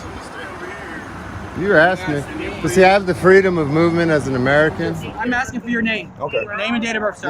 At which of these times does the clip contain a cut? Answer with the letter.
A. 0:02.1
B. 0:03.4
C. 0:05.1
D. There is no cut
C